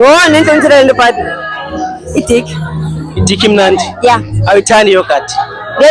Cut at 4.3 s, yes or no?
yes